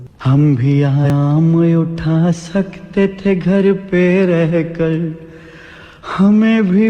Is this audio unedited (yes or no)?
no